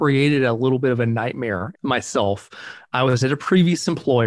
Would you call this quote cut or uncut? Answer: cut